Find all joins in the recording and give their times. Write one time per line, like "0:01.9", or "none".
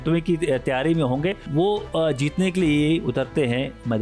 0:01.4